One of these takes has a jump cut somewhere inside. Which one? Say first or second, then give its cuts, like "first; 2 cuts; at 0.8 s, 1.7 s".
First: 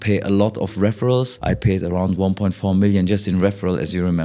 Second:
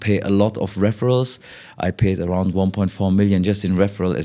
first; 1 cut; at 1.3 s